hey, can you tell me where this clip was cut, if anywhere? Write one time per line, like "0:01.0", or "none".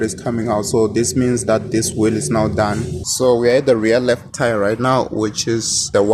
0:03.0

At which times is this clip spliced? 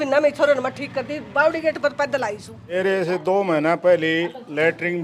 0:02.8

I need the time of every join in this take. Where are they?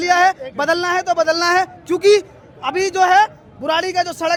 none

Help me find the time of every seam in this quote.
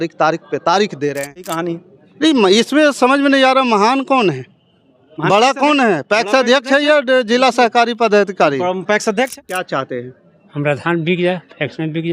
0:01.5
0:09.6

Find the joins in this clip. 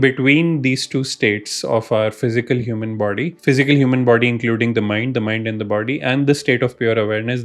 0:03.4

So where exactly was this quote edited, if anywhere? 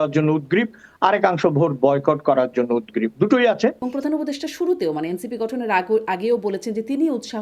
0:03.8

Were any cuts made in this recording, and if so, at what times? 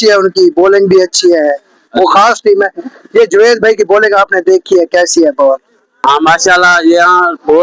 0:05.9

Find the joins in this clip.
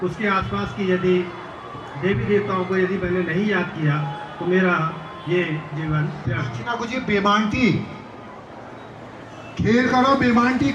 0:06.6

